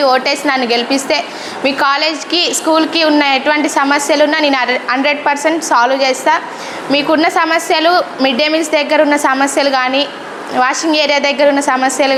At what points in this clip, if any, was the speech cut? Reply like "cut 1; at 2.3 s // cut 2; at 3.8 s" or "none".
none

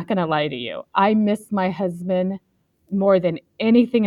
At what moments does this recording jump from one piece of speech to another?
none

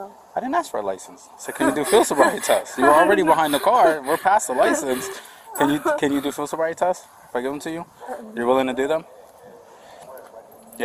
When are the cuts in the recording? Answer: none

